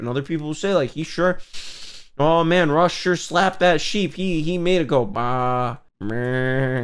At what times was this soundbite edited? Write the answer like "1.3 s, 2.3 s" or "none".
5.9 s

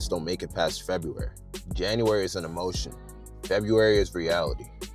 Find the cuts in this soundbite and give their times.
none

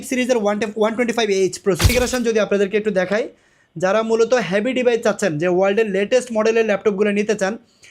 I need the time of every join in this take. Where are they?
1.9 s

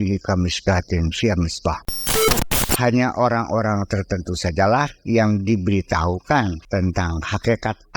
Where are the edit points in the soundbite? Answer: 2.3 s, 6.6 s

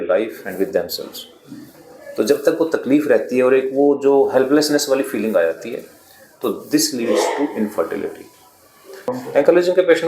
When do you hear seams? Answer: 9.1 s

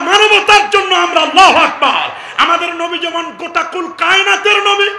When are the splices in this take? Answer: none

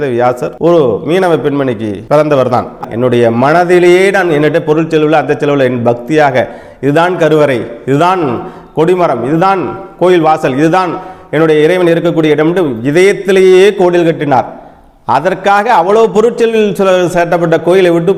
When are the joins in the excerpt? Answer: 2.8 s

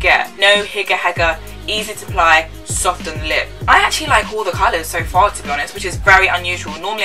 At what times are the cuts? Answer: 3.5 s

